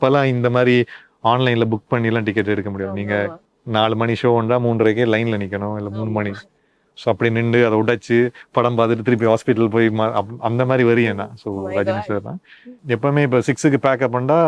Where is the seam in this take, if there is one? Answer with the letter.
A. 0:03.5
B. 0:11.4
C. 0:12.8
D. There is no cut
C